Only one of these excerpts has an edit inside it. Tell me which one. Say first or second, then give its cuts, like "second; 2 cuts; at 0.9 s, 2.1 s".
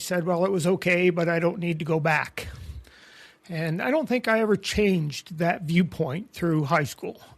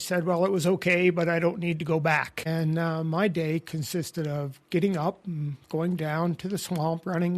second; 1 cut; at 2.4 s